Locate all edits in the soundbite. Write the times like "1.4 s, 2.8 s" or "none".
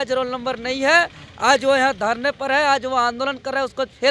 none